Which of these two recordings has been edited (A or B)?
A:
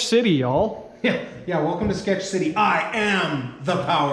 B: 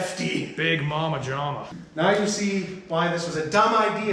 B